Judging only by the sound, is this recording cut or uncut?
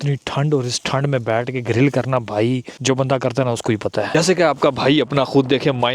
cut